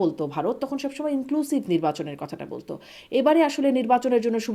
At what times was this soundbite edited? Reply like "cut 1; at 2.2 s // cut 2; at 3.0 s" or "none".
none